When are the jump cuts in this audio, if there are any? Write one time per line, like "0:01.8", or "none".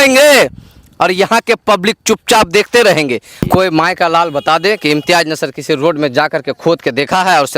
0:03.4